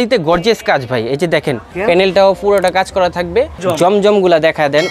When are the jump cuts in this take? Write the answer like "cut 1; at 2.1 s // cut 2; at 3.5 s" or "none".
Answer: cut 1; at 1.7 s // cut 2; at 3.6 s